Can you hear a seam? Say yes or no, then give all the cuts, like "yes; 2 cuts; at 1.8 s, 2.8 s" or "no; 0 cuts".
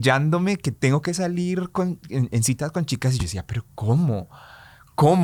no; 0 cuts